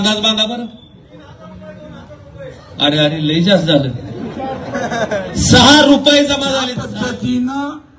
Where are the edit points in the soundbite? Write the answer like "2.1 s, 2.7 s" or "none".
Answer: 6.7 s